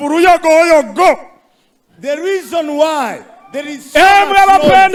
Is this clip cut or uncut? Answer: uncut